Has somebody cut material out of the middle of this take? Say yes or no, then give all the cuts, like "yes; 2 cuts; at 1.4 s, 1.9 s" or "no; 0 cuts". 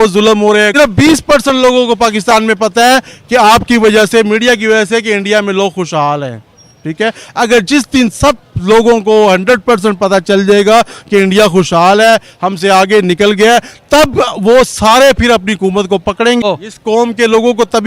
yes; 2 cuts; at 0.7 s, 16.4 s